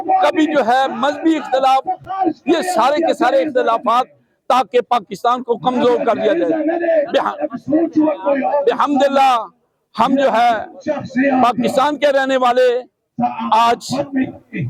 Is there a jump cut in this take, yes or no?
no